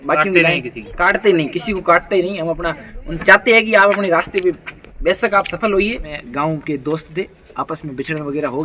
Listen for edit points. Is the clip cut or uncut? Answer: cut